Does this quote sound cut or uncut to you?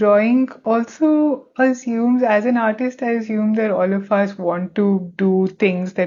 uncut